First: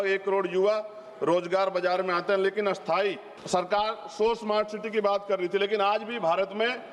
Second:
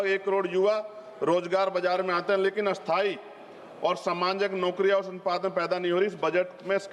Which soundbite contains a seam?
first; 1 cut; at 3.3 s

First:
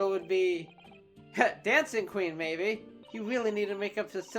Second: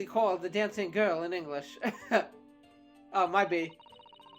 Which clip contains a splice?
first; 1 cut; at 3.0 s

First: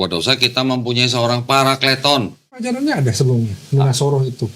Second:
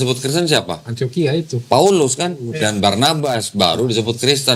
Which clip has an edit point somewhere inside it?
first; 1 cut; at 2.6 s

